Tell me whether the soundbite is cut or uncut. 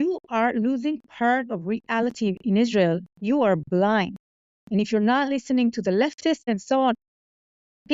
cut